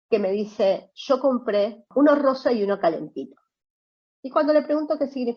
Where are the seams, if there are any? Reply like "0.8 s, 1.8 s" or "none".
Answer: 1.8 s